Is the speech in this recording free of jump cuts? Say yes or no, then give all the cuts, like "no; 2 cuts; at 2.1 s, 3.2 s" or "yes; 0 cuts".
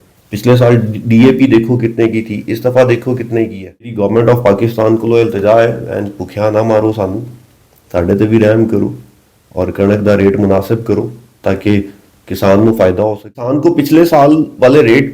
no; 2 cuts; at 3.9 s, 13.5 s